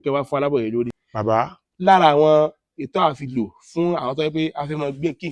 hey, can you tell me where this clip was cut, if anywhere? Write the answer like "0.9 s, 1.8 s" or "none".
1.0 s